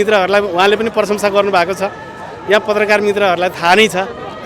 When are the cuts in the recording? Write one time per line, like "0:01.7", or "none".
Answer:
none